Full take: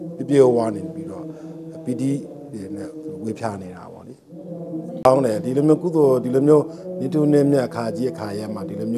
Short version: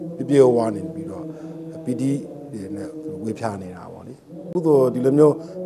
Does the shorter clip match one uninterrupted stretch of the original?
no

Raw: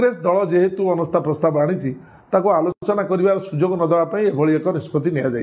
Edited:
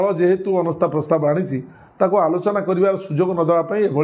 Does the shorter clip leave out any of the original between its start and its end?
yes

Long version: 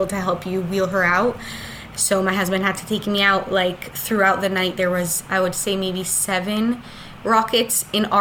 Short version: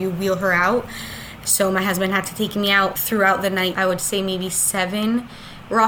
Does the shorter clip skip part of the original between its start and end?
yes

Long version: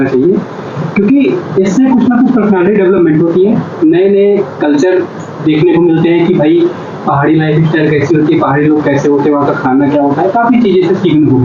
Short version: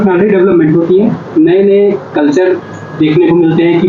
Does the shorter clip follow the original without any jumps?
yes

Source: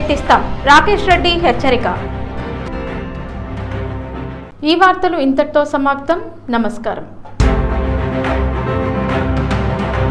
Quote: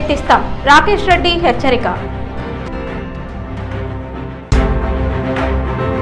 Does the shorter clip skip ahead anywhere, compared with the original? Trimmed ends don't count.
yes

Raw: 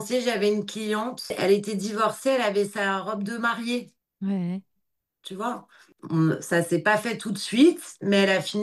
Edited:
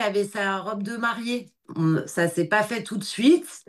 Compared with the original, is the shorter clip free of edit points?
no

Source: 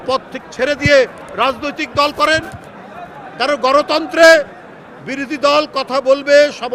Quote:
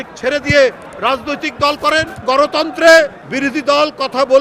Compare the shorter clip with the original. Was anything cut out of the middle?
yes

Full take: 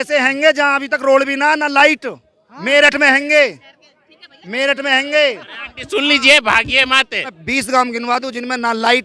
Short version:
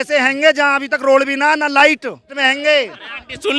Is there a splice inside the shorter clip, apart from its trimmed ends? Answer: yes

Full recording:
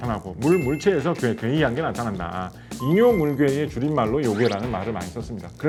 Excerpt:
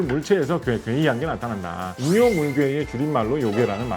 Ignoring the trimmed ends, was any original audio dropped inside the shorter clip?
yes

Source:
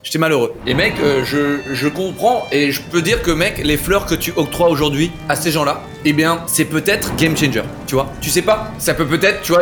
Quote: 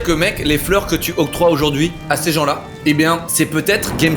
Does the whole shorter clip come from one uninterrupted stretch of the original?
yes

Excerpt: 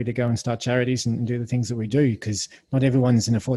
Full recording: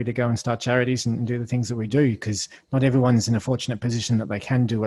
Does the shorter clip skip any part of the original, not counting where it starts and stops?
no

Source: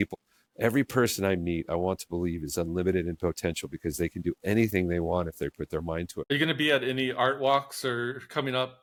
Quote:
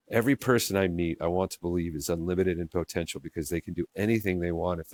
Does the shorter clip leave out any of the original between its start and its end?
no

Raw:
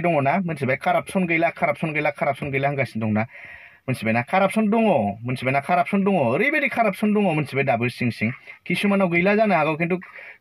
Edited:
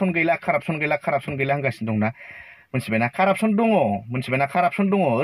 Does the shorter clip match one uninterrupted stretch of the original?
yes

